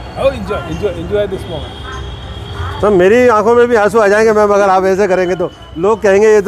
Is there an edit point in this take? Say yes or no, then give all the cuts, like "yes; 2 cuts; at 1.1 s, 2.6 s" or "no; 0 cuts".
no; 0 cuts